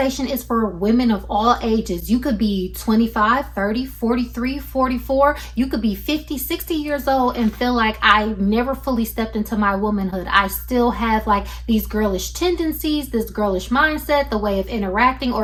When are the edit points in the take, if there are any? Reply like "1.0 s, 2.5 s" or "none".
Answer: none